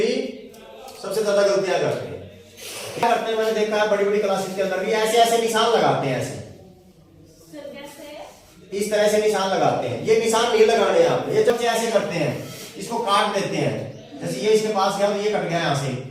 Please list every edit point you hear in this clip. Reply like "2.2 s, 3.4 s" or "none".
3.0 s, 11.5 s

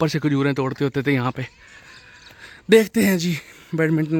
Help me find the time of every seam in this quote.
none

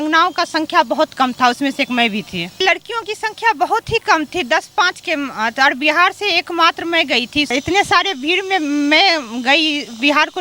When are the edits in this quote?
2.6 s, 7.5 s

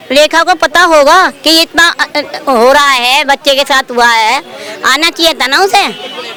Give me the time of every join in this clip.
none

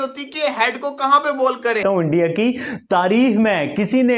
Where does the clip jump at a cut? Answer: 1.8 s

